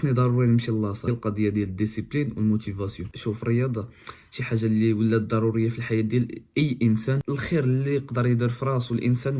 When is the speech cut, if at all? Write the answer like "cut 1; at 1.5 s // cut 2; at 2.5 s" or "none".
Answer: cut 1; at 1.1 s // cut 2; at 3.1 s // cut 3; at 7.2 s